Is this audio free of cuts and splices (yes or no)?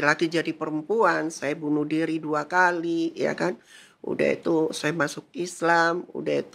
yes